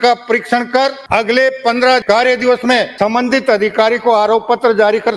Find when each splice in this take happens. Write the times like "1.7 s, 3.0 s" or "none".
1.0 s, 2.0 s, 2.9 s